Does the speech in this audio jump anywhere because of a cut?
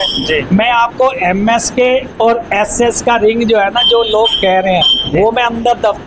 no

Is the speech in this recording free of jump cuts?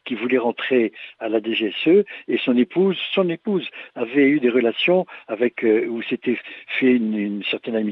yes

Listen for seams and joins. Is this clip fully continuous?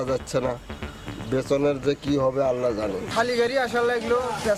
yes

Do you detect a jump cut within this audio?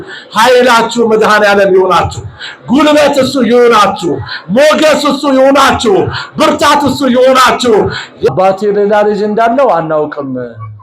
yes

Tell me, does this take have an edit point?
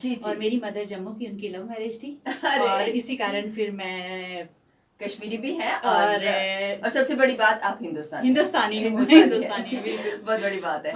no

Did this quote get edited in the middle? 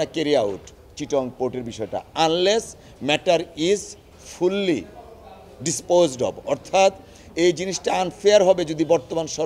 no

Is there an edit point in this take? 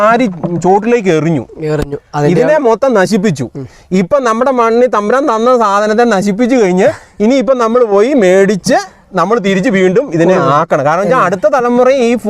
no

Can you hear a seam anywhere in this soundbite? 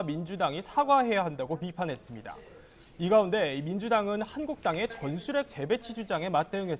no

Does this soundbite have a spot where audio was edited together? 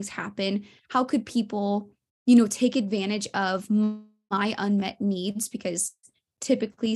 no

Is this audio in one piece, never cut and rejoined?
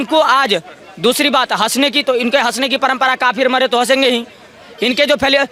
yes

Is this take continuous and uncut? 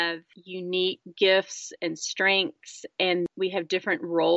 no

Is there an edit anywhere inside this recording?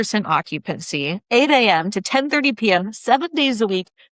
yes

